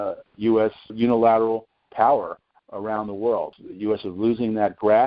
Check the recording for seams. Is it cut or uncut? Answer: cut